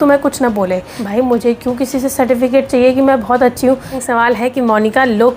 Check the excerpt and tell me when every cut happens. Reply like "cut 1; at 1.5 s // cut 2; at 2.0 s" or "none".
cut 1; at 1.0 s // cut 2; at 4.0 s